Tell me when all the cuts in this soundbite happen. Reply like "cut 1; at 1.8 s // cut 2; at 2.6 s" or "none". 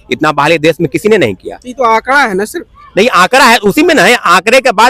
none